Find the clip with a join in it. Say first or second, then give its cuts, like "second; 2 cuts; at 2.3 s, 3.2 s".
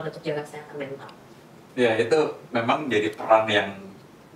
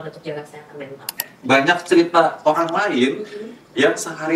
second; 1 cut; at 1.6 s